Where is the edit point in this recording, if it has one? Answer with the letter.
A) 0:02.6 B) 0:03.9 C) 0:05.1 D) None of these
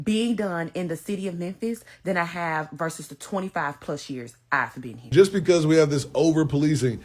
C